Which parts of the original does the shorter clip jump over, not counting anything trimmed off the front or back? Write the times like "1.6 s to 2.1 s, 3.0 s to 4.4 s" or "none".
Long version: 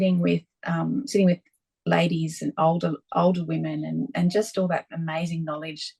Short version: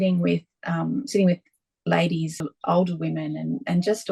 2.4 s to 2.9 s